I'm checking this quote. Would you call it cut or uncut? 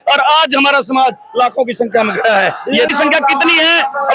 cut